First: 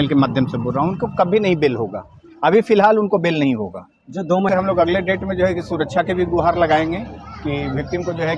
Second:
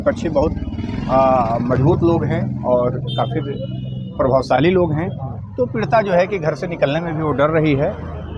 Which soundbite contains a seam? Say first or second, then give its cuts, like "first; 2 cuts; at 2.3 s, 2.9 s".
first; 1 cut; at 4.5 s